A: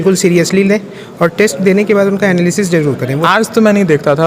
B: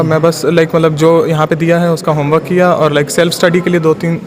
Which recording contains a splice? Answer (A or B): A